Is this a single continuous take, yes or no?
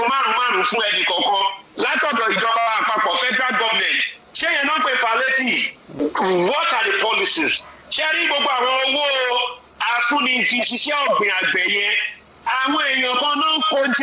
no